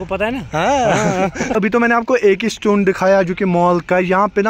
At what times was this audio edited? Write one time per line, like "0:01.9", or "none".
0:01.5